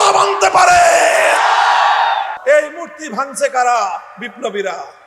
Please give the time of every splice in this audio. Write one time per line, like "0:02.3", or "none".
0:02.4

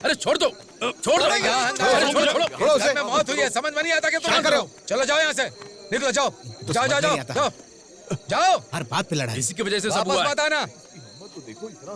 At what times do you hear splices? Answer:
none

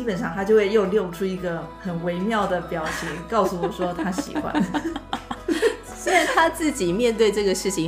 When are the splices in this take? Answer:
0:01.7

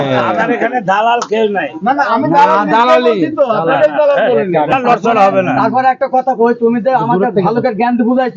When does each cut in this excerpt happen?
0:04.7

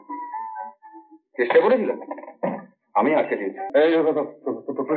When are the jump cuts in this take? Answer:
0:03.6

